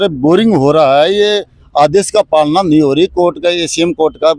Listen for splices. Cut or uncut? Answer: uncut